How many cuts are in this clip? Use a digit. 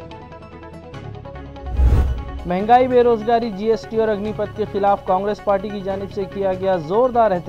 1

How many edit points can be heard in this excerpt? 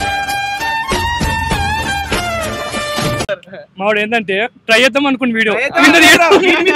0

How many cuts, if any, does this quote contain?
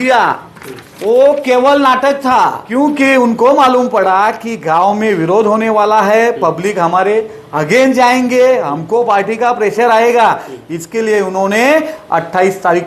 1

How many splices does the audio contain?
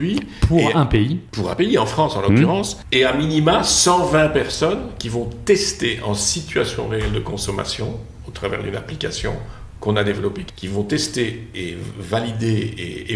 4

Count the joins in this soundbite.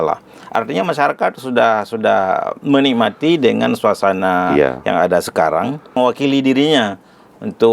1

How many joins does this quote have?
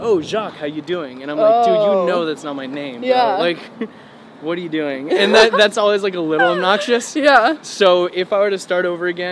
0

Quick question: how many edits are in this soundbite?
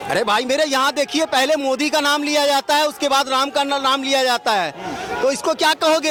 0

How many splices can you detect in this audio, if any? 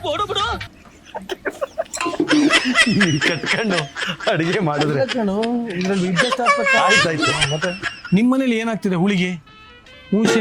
1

